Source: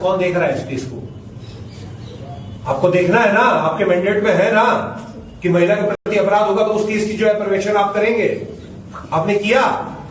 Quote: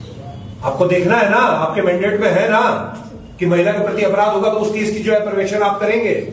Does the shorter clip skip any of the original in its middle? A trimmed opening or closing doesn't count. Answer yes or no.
yes